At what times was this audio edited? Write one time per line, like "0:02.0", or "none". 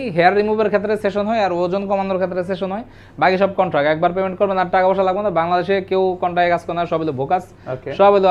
none